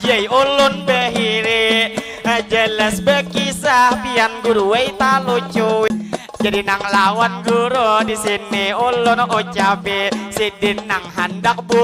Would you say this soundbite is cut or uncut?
cut